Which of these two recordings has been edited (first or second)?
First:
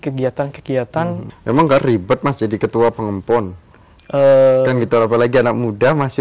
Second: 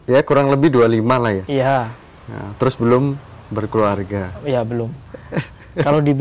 first